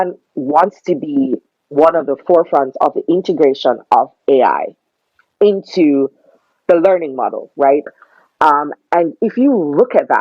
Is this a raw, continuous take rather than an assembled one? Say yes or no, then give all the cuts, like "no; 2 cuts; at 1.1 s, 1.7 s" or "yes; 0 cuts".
no; 1 cut; at 7.9 s